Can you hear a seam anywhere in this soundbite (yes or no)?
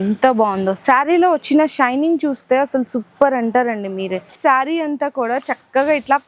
yes